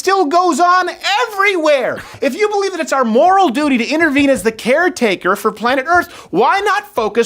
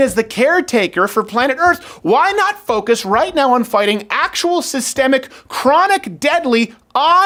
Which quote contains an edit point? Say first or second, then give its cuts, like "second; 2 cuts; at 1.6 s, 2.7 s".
first; 1 cut; at 2.1 s